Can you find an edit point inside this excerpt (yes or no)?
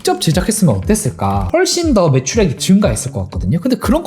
yes